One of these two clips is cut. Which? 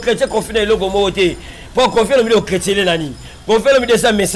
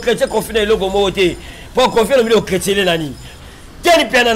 second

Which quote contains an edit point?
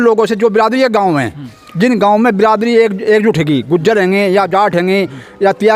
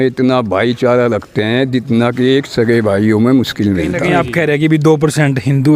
second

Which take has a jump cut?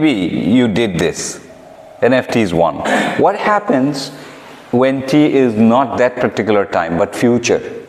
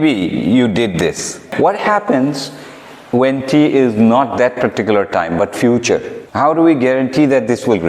second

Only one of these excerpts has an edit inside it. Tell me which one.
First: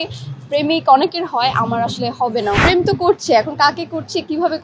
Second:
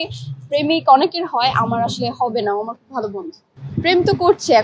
first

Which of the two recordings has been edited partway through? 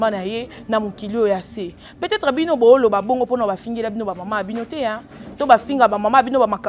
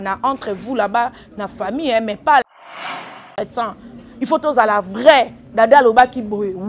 second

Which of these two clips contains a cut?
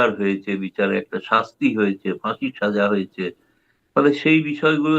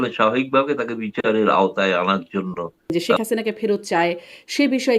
second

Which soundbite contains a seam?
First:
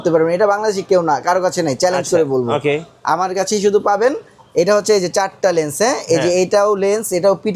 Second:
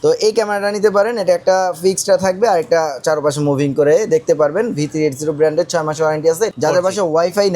second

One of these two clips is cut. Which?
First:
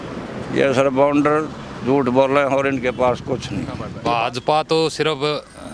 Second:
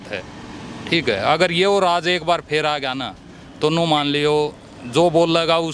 first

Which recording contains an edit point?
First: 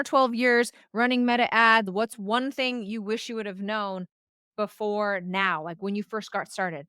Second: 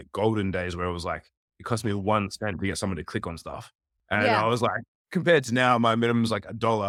first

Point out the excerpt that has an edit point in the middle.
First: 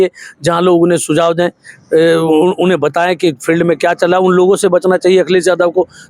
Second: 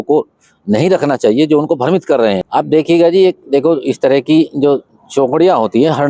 second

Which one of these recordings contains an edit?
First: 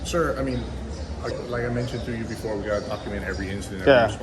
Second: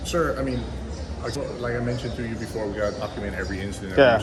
first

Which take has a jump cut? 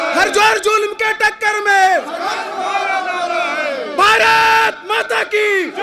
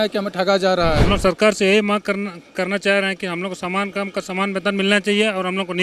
second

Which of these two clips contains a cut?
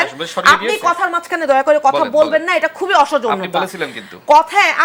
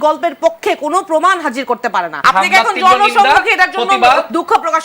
second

